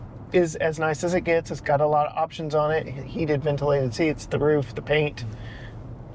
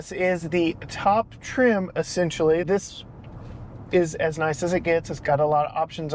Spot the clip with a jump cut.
second; 1 cut; at 2.6 s

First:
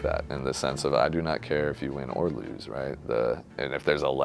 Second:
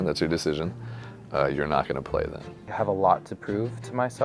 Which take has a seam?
second; 1 cut; at 2.7 s

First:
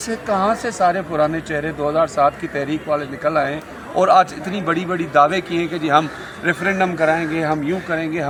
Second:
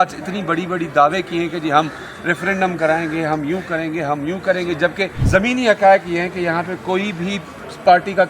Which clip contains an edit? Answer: second; 1 cut; at 5.2 s

